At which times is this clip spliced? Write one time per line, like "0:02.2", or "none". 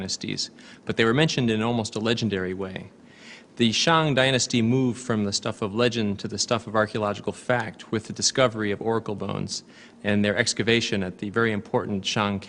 0:10.4